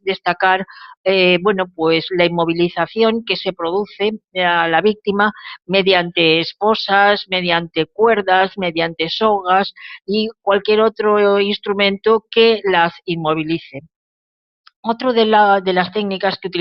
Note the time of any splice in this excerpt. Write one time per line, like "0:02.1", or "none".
0:09.4